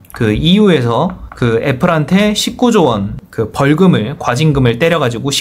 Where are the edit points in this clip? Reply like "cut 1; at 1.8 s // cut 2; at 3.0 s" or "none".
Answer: cut 1; at 1.2 s